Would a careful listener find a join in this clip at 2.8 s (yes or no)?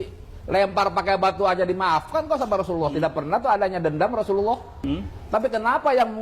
no